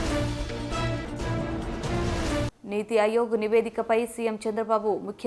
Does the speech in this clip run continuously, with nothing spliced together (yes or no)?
yes